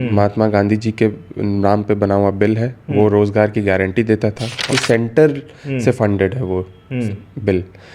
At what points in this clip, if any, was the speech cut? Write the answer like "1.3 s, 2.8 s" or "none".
4.6 s